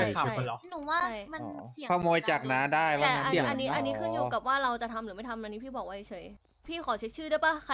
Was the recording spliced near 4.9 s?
no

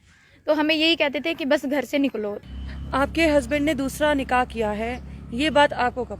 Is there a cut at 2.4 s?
yes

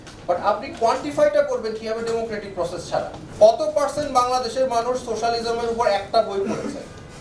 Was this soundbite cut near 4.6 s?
no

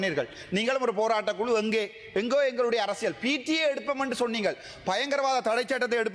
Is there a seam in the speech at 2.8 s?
no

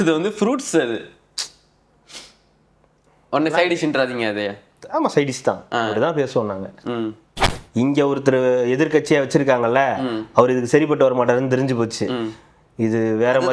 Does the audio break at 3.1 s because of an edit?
no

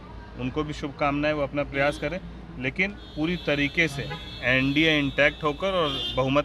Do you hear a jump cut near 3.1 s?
no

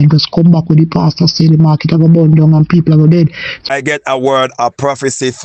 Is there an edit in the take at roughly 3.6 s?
yes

